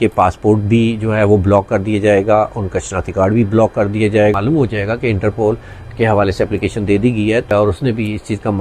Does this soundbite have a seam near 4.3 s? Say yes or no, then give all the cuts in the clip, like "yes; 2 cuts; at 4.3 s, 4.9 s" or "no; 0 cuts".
yes; 2 cuts; at 4.3 s, 7.5 s